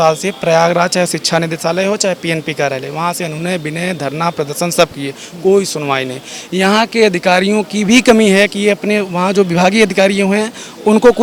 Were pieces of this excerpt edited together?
no; 0 cuts

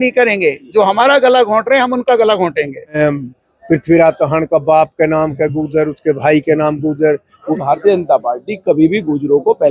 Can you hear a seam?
yes; 2 cuts; at 3.0 s, 7.5 s

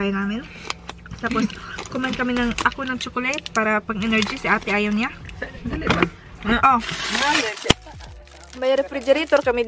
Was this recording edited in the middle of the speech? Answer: no; 0 cuts

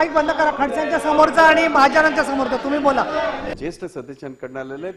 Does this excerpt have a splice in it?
yes; 1 cut; at 3.5 s

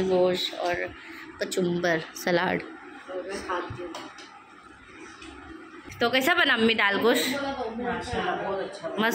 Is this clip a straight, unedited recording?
no; 1 cut; at 5.9 s

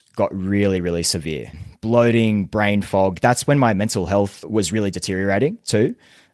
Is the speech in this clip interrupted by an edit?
yes; 2 cuts; at 1.6 s, 4.4 s

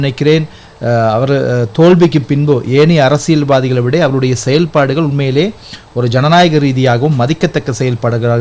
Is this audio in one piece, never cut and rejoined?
yes; 0 cuts

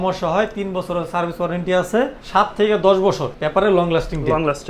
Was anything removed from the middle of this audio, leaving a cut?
yes; 2 cuts; at 2.2 s, 3.3 s

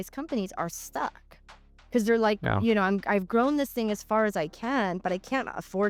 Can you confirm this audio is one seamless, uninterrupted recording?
yes; 0 cuts

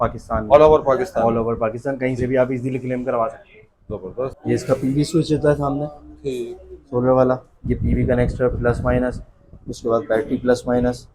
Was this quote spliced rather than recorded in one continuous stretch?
yes; 1 cut; at 4.4 s

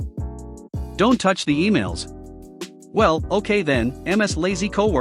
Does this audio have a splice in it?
yes; 1 cut; at 0.9 s

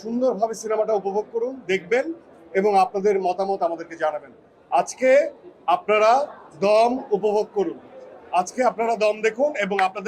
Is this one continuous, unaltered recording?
yes; 0 cuts

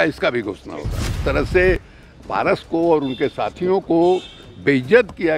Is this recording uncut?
no; 1 cut; at 1.2 s

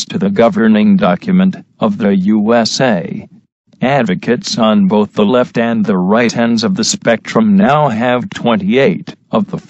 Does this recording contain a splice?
yes; 1 cut; at 1.9 s

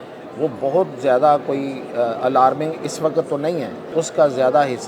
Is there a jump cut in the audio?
yes; 1 cut; at 3.9 s

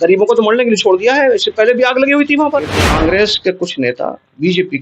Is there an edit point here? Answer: yes; 1 cut; at 2.8 s

